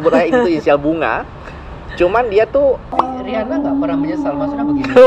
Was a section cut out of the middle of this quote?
yes; 1 cut; at 2.9 s

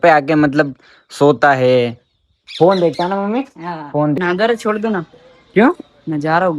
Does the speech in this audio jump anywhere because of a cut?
yes; 1 cut; at 4.2 s

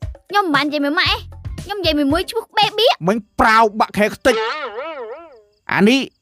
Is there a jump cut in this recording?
yes; 1 cut; at 3.0 s

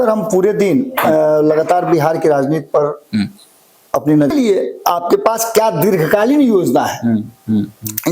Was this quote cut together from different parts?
yes; 1 cut; at 4.3 s

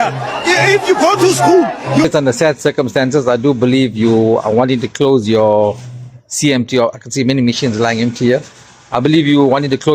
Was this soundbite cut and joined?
yes; 1 cut; at 2.1 s

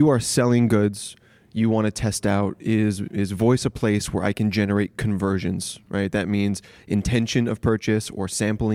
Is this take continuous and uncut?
yes; 0 cuts

